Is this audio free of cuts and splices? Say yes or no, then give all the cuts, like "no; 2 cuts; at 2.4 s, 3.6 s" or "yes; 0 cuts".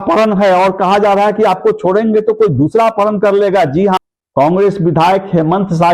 no; 1 cut; at 4.0 s